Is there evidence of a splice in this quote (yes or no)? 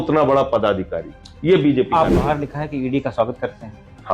yes